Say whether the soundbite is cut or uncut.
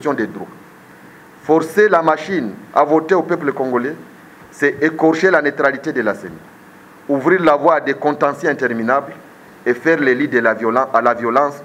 uncut